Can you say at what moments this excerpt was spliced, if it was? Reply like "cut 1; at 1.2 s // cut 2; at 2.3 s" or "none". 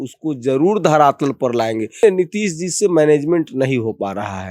cut 1; at 2.0 s

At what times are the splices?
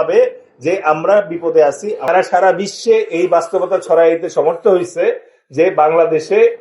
cut 1; at 2.1 s

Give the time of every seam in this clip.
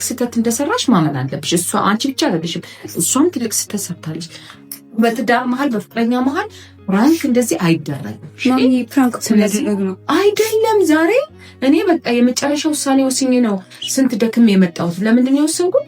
none

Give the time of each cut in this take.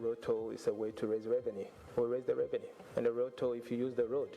cut 1; at 1.7 s // cut 2; at 2.8 s

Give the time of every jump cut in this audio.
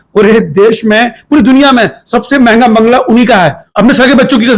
cut 1; at 3.6 s

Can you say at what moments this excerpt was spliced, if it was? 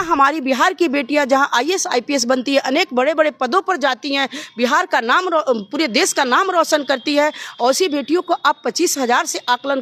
none

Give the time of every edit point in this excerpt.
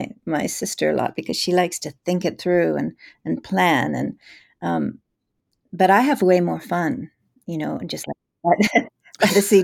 none

